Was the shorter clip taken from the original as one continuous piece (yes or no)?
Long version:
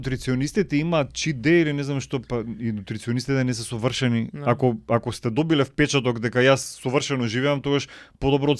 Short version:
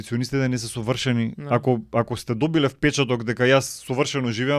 yes